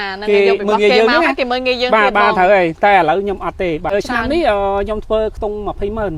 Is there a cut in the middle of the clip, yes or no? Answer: yes